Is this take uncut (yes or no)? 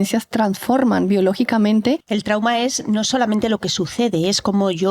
no